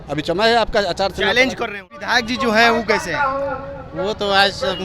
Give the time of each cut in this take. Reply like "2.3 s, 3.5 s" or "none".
1.9 s